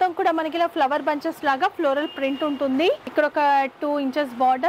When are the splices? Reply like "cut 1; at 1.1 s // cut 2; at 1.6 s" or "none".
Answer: cut 1; at 3.0 s